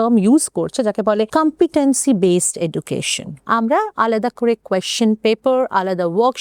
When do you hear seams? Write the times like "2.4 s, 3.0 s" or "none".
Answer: 1.3 s, 3.4 s